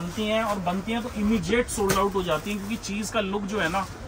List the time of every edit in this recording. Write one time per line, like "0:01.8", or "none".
none